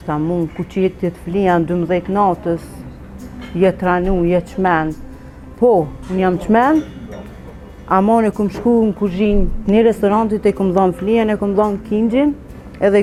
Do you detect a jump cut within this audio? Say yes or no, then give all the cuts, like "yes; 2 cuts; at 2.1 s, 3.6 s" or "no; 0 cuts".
no; 0 cuts